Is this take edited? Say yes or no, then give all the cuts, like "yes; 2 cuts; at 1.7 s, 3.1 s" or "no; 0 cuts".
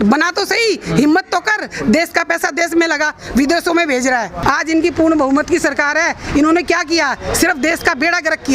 yes; 1 cut; at 4.4 s